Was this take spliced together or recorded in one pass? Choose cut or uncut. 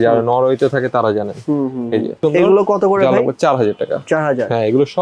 cut